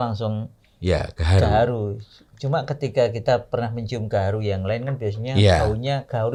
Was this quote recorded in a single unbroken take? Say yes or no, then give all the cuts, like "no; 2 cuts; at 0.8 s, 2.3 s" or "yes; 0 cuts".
yes; 0 cuts